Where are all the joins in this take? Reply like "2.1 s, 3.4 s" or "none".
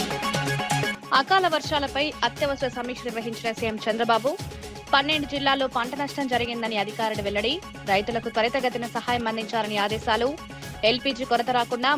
0.9 s